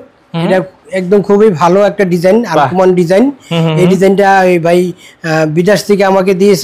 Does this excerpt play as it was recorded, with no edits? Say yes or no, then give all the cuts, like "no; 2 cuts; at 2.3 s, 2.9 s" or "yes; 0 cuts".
yes; 0 cuts